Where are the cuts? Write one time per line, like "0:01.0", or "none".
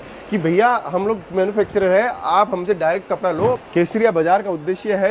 0:03.6